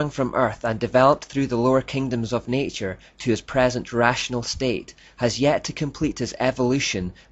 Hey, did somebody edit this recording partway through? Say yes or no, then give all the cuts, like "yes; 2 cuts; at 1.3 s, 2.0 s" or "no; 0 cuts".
no; 0 cuts